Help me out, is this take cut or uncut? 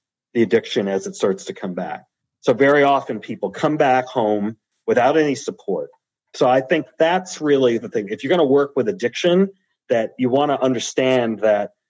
uncut